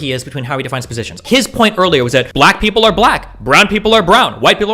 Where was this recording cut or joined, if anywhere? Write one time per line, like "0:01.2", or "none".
0:01.2
0:02.3